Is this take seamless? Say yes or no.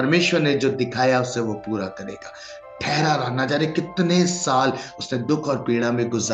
yes